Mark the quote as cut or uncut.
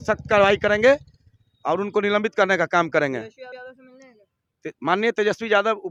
uncut